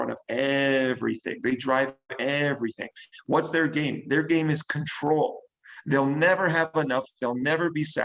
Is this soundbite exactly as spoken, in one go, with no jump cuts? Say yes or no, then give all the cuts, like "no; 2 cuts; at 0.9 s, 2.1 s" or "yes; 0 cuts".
yes; 0 cuts